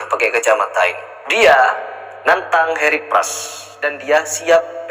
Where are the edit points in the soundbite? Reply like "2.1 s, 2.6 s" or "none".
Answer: none